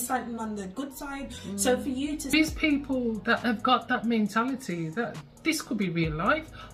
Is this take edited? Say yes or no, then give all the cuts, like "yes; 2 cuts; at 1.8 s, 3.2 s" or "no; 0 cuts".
yes; 1 cut; at 2.3 s